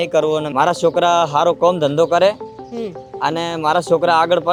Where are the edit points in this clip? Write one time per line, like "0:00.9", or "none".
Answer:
none